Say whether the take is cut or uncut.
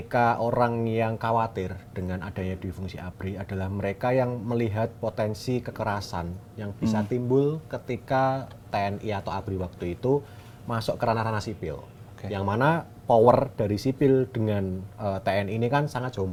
uncut